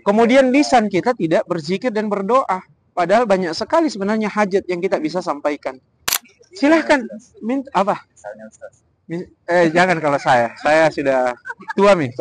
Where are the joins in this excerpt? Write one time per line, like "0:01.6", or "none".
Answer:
0:06.2